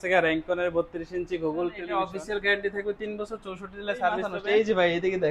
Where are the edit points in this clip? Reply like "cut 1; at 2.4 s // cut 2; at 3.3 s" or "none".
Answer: cut 1; at 1.8 s // cut 2; at 4.3 s